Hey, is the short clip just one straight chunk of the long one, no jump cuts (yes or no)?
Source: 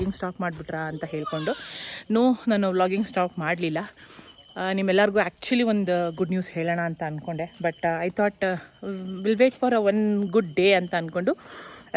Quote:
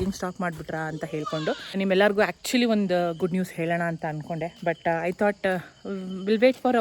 no